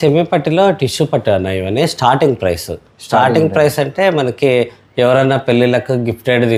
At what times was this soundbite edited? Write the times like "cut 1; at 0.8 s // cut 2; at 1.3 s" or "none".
none